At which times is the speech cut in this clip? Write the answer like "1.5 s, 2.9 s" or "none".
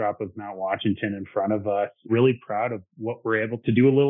2.1 s